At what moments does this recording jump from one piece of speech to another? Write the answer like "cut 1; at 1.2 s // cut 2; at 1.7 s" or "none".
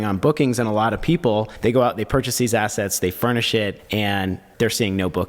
cut 1; at 1.5 s // cut 2; at 3.8 s

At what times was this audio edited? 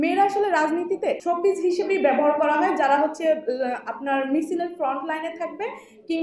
cut 1; at 1.2 s

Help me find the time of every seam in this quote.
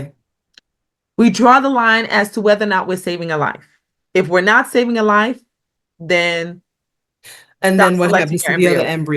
none

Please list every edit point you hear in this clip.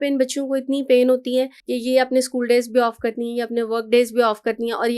cut 1; at 1.6 s

